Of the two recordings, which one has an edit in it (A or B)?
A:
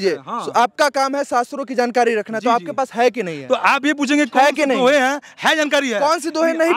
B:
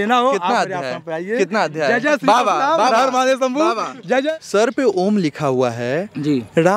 B